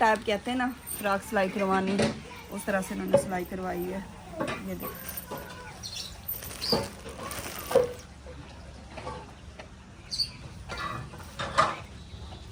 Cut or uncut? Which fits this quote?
uncut